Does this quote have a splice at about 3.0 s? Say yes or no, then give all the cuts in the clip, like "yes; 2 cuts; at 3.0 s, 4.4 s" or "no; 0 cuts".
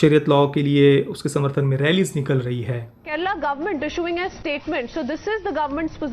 yes; 1 cut; at 3.0 s